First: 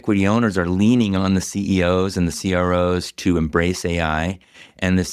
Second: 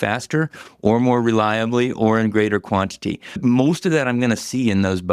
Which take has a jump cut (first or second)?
second